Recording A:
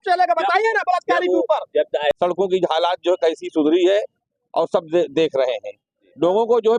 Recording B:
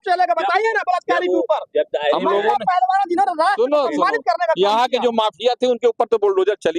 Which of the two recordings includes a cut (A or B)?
A